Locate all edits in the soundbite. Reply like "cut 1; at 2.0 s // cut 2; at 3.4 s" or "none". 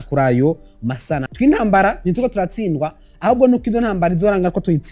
cut 1; at 1.2 s